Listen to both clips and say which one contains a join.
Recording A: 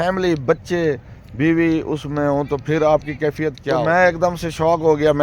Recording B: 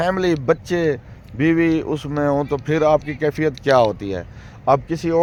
A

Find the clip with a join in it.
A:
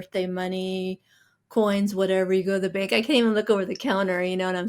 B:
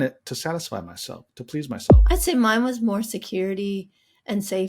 B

